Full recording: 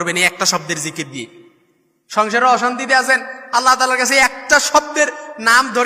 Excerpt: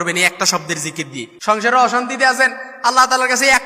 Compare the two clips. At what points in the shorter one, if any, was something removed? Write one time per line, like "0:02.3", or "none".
0:01.3